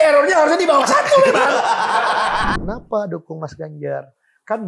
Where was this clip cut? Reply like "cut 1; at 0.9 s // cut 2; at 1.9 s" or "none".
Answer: cut 1; at 2.5 s